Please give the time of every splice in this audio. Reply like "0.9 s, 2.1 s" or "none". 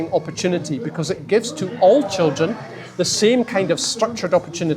none